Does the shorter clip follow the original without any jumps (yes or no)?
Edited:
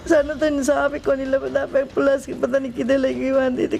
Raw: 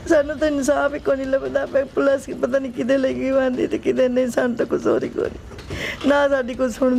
yes